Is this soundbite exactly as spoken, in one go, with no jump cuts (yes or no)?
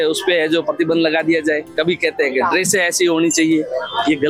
yes